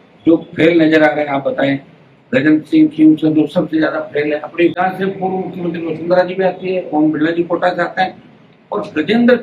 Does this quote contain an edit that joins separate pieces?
yes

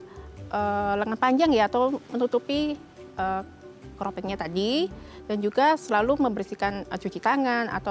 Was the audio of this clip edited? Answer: no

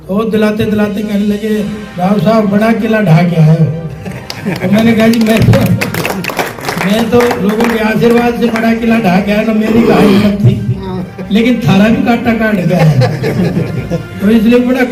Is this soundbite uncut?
yes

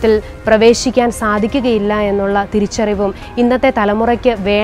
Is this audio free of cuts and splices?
yes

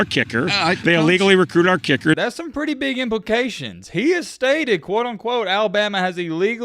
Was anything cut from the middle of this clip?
yes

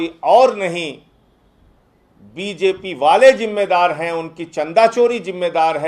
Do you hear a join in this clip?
no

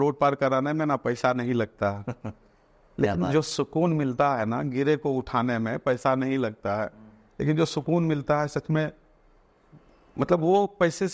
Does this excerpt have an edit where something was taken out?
no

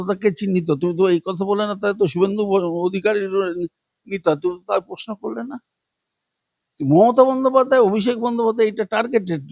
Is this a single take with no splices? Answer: yes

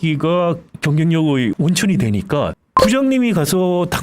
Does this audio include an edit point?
yes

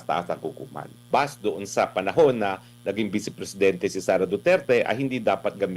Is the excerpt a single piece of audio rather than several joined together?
no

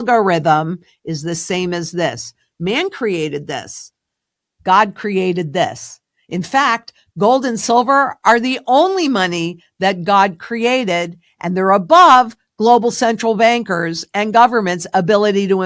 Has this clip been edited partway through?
no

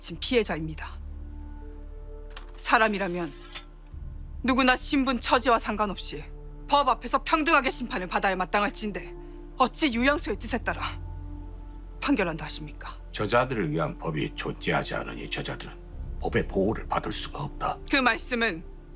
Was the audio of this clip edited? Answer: yes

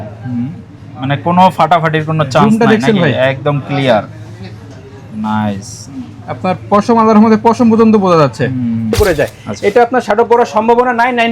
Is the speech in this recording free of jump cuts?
no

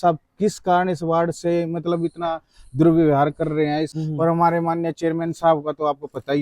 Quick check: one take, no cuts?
no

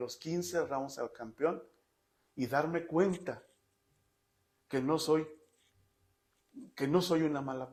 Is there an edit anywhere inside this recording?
no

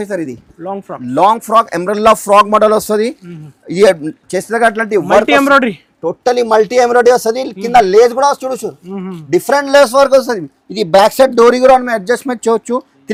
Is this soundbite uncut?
yes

